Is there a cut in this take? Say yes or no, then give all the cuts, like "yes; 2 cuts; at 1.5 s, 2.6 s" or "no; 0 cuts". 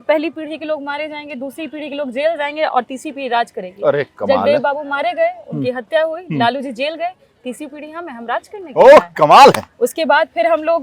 no; 0 cuts